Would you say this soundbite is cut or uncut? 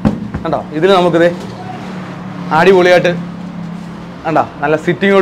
uncut